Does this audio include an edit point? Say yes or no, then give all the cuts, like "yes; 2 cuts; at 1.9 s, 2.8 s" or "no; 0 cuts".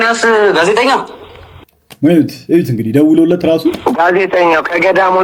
no; 0 cuts